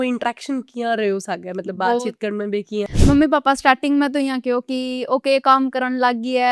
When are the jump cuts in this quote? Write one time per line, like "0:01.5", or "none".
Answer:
0:02.9

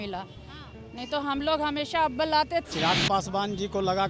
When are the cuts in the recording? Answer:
0:02.7

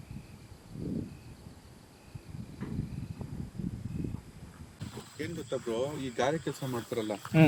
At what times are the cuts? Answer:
0:04.9

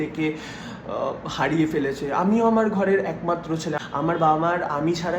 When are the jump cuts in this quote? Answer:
0:03.7

